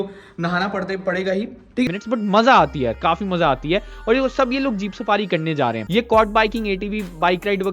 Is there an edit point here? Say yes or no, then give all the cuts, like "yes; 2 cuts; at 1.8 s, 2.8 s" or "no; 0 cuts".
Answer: yes; 2 cuts; at 1.9 s, 5.8 s